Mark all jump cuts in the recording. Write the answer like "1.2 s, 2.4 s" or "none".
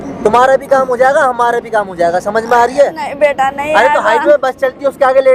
none